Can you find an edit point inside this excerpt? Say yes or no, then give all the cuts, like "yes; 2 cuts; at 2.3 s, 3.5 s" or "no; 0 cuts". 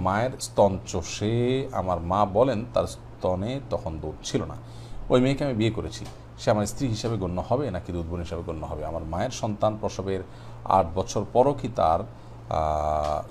no; 0 cuts